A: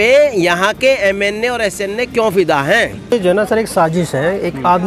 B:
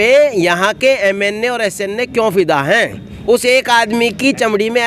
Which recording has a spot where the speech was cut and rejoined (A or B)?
A